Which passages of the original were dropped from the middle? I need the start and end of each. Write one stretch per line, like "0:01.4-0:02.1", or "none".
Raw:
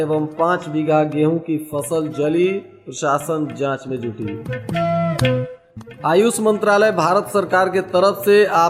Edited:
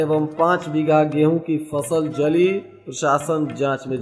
none

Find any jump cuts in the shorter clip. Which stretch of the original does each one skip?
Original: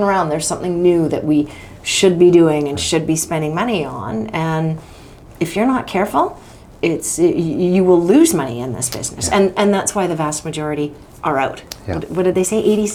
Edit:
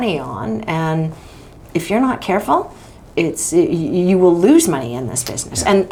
none

